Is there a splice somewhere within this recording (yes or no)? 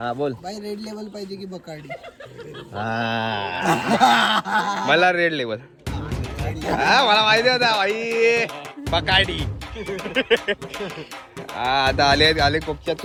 no